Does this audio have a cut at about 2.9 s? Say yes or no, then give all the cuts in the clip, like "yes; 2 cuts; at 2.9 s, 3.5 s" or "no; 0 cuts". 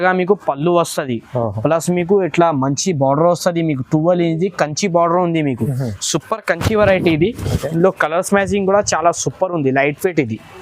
no; 0 cuts